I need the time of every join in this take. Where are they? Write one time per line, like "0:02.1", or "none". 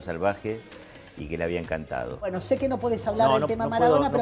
0:02.2